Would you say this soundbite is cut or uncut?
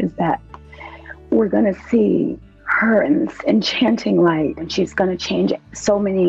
cut